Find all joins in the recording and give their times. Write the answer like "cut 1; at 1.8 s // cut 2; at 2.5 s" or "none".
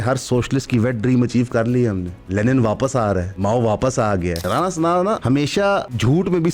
cut 1; at 2.1 s // cut 2; at 3.3 s // cut 3; at 4.4 s // cut 4; at 5.6 s